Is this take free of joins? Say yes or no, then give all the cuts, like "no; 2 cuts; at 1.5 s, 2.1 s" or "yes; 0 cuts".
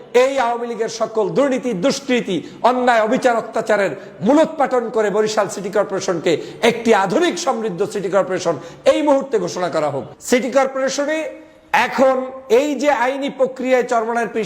no; 1 cut; at 10.1 s